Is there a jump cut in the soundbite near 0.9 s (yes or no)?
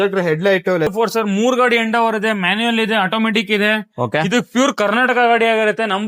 yes